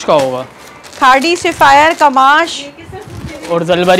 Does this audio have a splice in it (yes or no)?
no